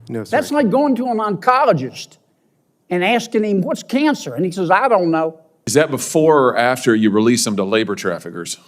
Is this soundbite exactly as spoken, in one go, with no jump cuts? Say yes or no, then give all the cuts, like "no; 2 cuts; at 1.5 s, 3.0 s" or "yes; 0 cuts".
no; 1 cut; at 5.6 s